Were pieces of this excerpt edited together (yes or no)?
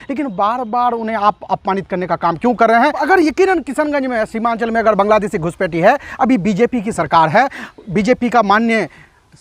yes